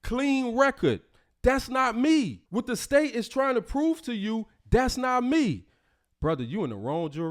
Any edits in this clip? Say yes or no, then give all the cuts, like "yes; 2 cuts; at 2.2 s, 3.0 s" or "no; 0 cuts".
yes; 1 cut; at 2.4 s